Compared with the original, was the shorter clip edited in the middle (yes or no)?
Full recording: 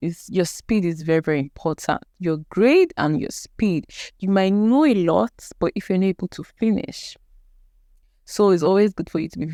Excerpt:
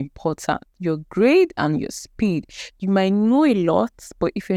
no